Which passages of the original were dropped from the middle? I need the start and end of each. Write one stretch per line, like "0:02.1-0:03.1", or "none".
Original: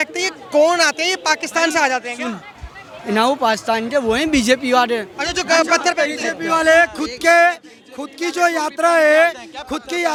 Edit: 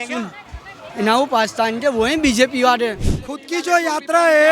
0:05.2-0:07.8